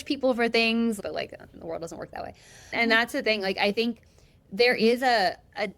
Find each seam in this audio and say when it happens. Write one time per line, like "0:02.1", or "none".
0:01.0
0:02.8